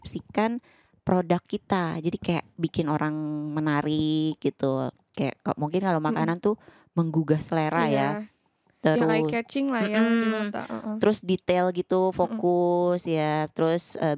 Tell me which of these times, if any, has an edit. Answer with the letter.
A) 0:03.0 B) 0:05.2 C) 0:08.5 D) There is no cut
D